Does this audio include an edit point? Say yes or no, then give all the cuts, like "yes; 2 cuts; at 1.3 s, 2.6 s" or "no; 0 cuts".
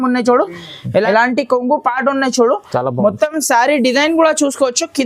yes; 1 cut; at 1.0 s